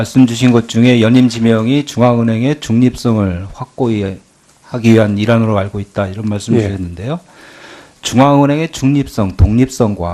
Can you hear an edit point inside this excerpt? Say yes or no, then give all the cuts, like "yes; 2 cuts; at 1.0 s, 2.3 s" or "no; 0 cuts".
no; 0 cuts